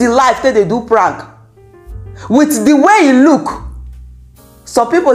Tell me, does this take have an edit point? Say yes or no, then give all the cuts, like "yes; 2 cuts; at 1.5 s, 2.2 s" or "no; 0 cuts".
no; 0 cuts